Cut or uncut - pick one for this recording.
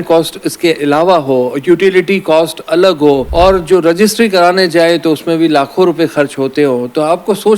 cut